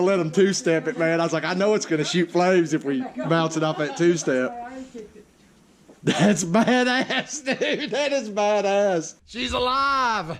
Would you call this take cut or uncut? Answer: cut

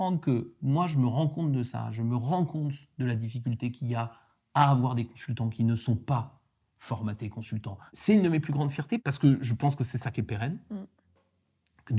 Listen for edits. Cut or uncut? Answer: cut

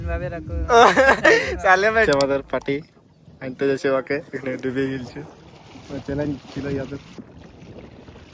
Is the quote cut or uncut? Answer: cut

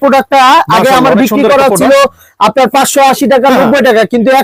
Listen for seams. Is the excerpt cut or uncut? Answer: uncut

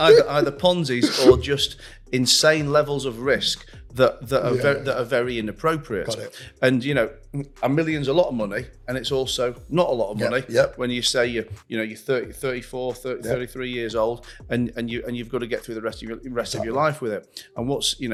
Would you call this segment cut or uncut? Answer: uncut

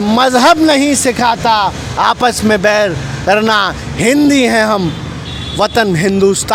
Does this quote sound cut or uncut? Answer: uncut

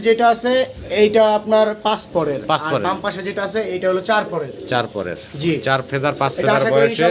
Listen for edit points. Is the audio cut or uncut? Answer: uncut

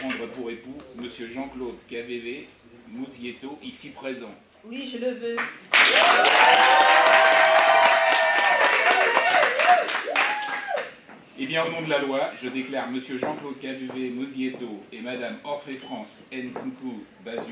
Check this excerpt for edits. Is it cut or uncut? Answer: uncut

